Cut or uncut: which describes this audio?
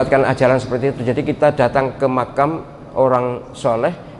uncut